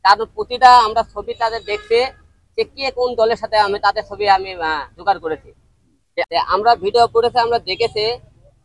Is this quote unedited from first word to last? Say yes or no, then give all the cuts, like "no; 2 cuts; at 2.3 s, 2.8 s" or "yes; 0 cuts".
no; 1 cut; at 6.3 s